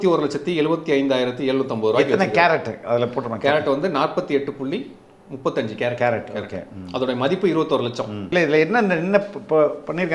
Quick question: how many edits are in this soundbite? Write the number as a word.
one